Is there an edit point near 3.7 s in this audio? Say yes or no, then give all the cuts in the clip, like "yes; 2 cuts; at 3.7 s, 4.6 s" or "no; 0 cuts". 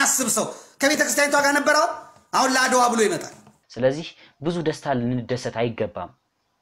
yes; 1 cut; at 3.7 s